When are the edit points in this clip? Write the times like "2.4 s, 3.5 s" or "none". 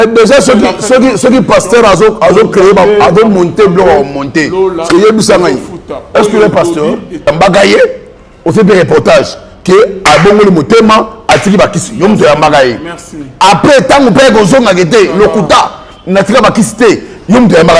7.3 s